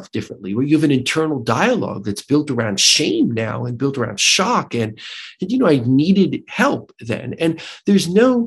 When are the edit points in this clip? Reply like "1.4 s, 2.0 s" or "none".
none